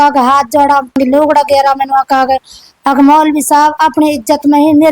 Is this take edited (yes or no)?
yes